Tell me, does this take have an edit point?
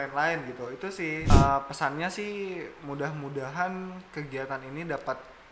yes; 1 cut; at 1.3 s

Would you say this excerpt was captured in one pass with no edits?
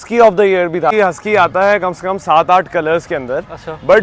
no; 1 cut; at 0.9 s

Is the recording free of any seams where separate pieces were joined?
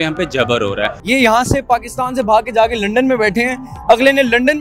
no; 1 cut; at 0.9 s

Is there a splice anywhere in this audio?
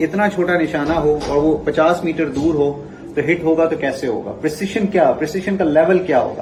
no; 0 cuts

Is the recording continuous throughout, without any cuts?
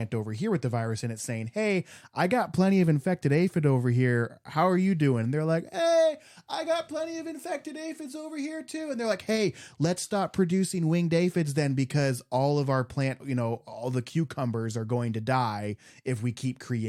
yes; 0 cuts

